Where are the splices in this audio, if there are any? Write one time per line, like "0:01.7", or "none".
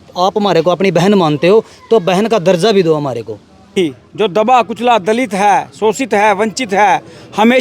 0:03.8